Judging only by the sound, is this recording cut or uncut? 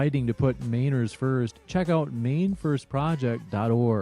uncut